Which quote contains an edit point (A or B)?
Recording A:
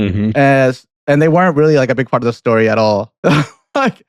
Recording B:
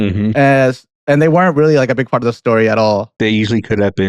B